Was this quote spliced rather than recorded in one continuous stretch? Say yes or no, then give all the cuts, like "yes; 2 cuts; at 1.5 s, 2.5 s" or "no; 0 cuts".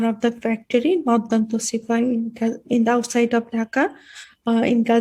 no; 0 cuts